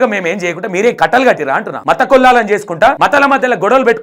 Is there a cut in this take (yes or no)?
yes